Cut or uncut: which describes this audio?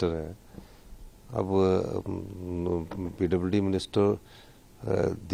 uncut